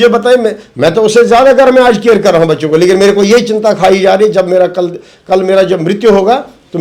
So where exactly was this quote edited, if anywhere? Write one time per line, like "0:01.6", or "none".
none